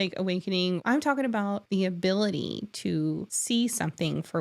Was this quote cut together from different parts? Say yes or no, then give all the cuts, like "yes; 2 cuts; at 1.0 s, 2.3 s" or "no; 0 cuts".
yes; 3 cuts; at 0.8 s, 1.6 s, 3.3 s